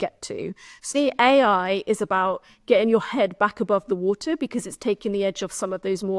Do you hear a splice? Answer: yes; 1 cut; at 0.9 s

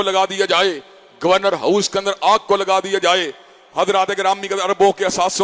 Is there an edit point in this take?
no; 0 cuts

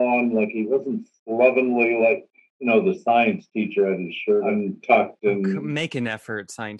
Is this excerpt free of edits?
no; 2 cuts; at 4.5 s, 5.6 s

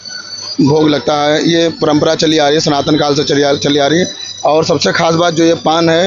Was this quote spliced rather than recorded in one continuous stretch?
no; 0 cuts

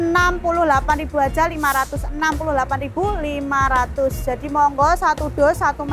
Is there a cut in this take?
no; 0 cuts

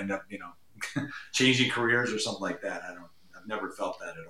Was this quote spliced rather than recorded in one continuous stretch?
no; 0 cuts

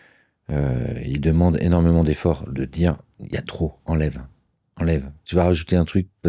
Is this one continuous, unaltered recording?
no; 1 cut; at 5.2 s

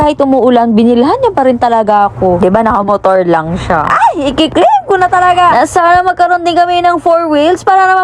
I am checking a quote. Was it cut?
no; 0 cuts

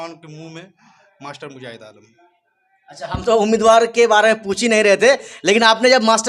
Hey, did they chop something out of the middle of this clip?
no; 0 cuts

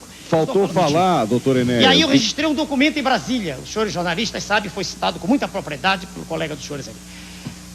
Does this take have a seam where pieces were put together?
yes; 1 cut; at 1.8 s

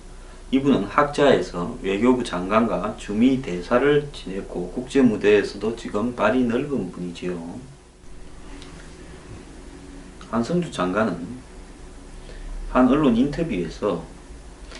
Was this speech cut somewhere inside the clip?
yes; 1 cut; at 5.8 s

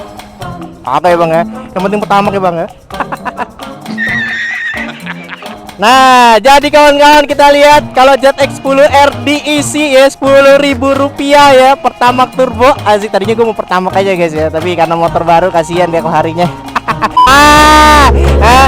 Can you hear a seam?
yes; 1 cut; at 17.3 s

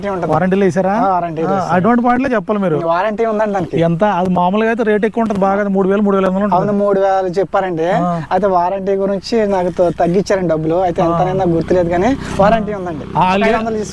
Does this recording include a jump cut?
no; 0 cuts

